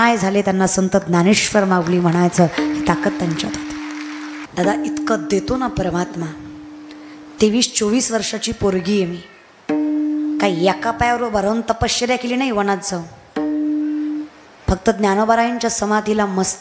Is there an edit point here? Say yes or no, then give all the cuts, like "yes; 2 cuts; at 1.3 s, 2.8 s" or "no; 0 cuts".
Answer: yes; 1 cut; at 4.4 s